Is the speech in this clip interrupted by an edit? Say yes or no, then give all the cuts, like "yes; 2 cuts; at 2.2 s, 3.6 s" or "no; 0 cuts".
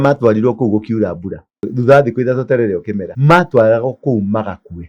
yes; 2 cuts; at 1.7 s, 3.0 s